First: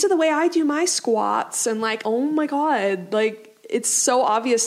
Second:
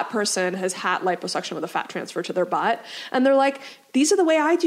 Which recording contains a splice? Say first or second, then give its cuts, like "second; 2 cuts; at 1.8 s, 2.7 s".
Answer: first; 1 cut; at 2.0 s